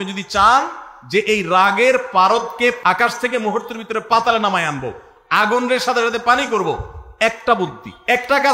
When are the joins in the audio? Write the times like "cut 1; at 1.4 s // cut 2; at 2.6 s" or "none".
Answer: cut 1; at 2.8 s